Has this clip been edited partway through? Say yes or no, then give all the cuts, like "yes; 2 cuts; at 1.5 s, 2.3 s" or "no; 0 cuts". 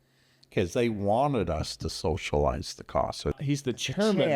yes; 1 cut; at 3.4 s